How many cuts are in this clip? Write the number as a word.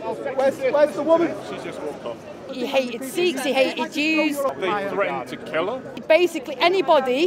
three